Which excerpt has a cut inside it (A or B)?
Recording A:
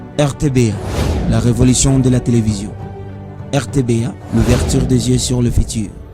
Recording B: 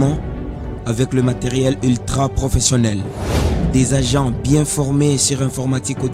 A